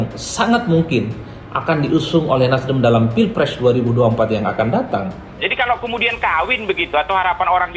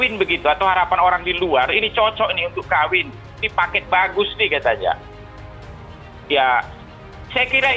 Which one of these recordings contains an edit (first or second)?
first